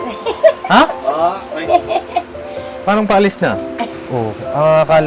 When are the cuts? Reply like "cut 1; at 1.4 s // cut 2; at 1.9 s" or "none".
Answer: cut 1; at 3.8 s